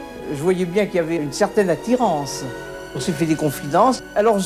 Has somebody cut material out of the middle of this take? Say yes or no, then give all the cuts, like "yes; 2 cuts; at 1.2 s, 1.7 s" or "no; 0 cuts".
no; 0 cuts